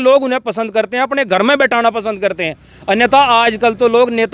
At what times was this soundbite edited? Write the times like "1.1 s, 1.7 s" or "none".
none